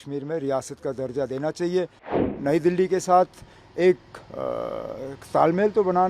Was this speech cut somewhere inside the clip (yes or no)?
yes